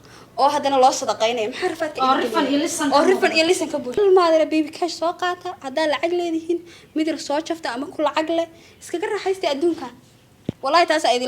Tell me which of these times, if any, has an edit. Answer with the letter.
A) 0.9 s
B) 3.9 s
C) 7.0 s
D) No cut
B